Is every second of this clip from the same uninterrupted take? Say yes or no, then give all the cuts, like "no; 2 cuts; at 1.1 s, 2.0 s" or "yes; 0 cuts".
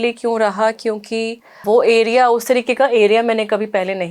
no; 1 cut; at 1.6 s